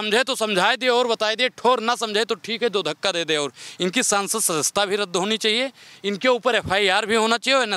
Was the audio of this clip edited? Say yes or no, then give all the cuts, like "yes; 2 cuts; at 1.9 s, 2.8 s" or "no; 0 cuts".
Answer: no; 0 cuts